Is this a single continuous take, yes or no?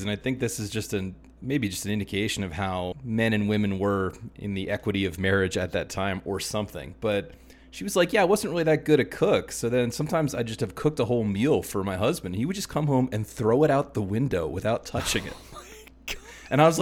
no